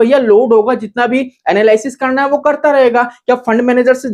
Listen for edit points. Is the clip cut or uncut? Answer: uncut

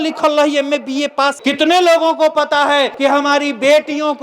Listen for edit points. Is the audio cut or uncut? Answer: cut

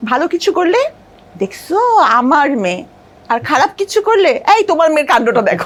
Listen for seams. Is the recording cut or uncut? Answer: uncut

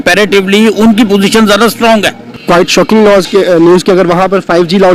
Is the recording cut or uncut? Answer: cut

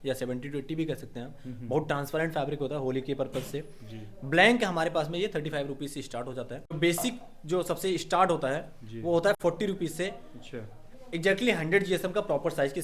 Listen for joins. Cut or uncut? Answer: cut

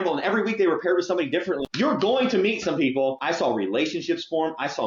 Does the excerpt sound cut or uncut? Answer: cut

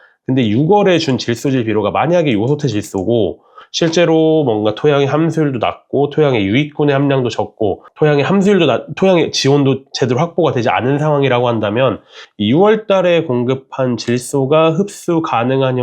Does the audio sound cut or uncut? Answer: cut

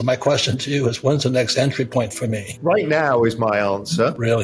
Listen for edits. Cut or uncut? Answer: cut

